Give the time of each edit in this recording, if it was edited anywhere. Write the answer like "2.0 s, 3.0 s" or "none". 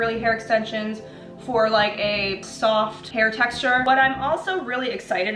2.5 s, 3.8 s